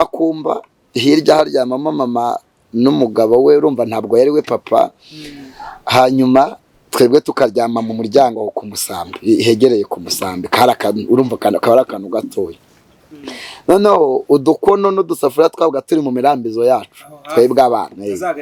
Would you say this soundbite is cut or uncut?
uncut